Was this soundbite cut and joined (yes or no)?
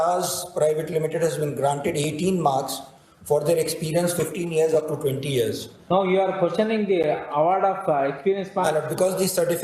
no